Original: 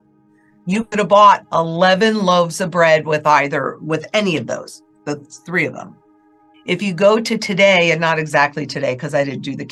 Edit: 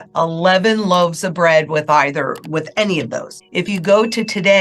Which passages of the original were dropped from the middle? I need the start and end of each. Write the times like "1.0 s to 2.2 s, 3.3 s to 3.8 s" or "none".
4.7 s to 6.5 s